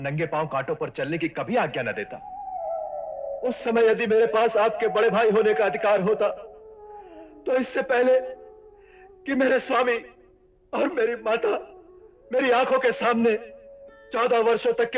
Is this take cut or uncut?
cut